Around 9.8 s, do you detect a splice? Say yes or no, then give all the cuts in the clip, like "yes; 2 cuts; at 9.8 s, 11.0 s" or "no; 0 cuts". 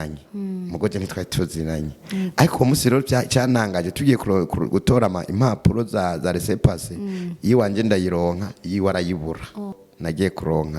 yes; 1 cut; at 9.8 s